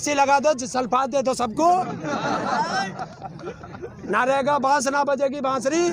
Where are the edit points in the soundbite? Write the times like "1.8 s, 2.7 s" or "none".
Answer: none